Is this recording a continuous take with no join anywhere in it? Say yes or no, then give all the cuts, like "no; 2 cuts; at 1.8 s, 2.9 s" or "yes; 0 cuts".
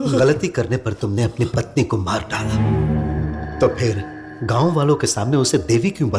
yes; 0 cuts